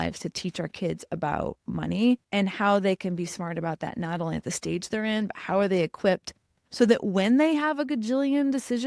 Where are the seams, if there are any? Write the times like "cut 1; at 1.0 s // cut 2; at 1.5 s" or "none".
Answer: cut 1; at 2.3 s